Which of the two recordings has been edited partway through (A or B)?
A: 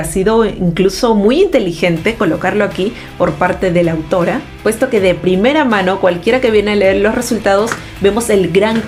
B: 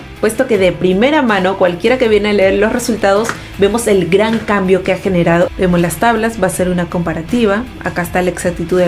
B